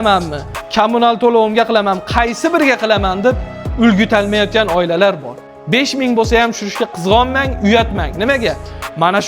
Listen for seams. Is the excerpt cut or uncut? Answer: cut